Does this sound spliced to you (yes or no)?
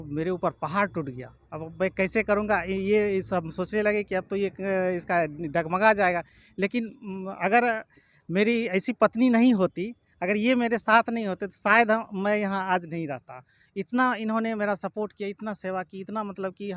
no